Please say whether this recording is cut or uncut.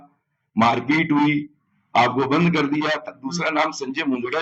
cut